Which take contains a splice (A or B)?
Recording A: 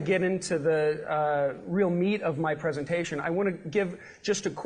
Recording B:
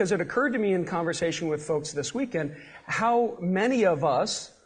A